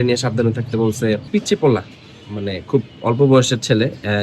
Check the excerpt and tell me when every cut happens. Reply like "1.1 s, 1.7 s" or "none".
1.2 s